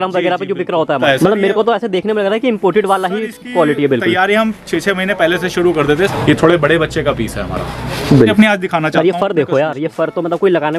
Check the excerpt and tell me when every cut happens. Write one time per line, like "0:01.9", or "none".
0:01.0
0:06.1
0:08.3